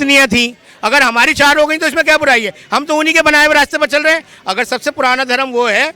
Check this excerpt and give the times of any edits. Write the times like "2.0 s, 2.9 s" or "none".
none

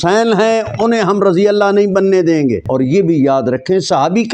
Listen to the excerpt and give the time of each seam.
2.7 s

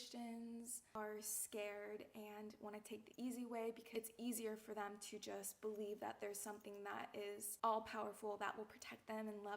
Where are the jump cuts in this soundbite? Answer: 0.9 s, 3.8 s

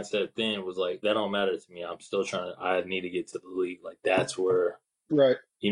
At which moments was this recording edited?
1.0 s

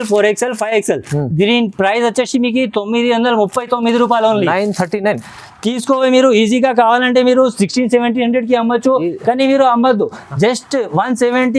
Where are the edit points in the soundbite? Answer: none

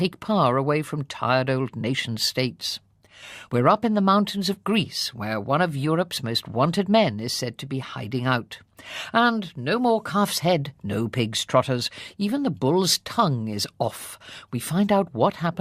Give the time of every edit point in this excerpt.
7.6 s

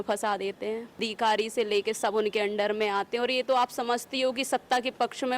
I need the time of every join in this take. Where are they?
1.1 s

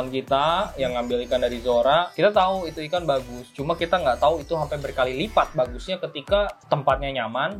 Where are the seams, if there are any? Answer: none

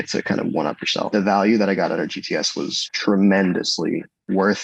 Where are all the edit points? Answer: 1.1 s

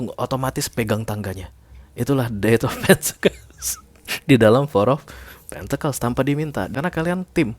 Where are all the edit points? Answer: 6.7 s

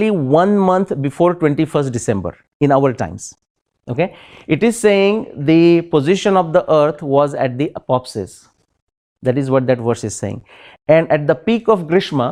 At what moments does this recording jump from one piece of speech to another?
none

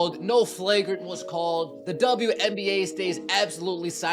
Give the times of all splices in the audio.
none

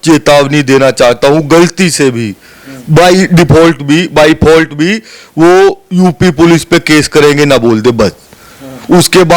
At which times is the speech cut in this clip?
none

